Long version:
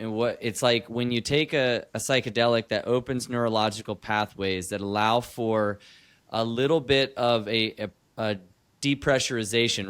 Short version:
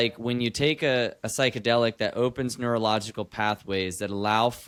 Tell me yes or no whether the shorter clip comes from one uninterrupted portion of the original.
yes